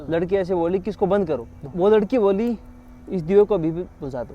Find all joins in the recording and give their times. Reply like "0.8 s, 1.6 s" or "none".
1.7 s